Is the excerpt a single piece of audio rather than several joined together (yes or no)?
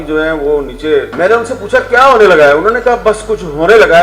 no